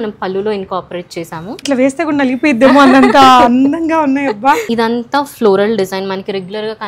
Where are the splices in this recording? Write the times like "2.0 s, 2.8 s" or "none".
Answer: 1.6 s, 4.7 s